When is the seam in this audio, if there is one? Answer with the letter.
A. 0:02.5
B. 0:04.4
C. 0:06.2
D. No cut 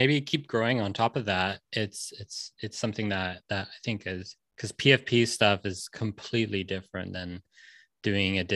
B